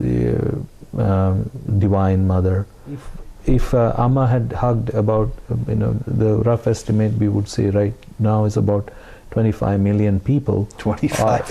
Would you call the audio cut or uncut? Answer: cut